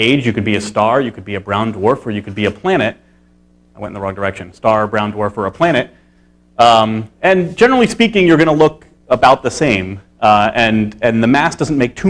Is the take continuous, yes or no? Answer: no